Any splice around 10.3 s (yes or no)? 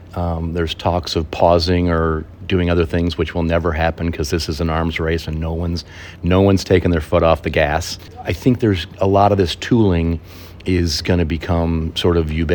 no